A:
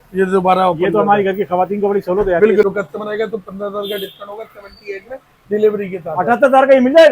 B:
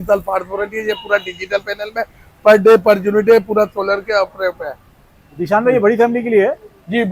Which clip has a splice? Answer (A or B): A